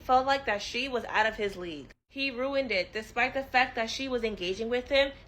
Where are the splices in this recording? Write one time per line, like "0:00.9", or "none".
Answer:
0:02.6